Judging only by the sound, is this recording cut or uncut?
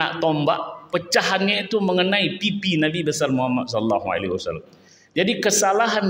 uncut